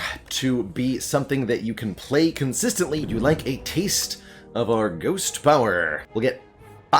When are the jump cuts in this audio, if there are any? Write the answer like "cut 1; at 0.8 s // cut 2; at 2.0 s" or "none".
cut 1; at 3.0 s // cut 2; at 6.0 s